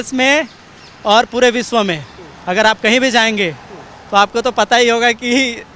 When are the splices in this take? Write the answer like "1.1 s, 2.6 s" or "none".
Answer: none

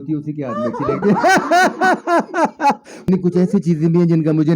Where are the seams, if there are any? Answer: 3.1 s

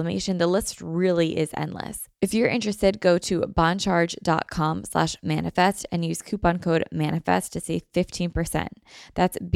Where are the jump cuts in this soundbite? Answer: 2.0 s

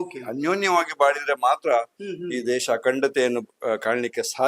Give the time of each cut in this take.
none

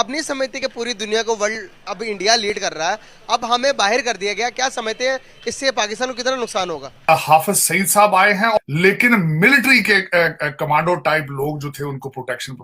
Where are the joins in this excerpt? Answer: 7.0 s, 8.6 s

